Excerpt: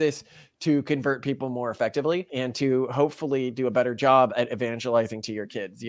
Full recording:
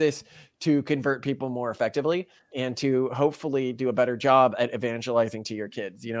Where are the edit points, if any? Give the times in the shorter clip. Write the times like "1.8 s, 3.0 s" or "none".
2.3 s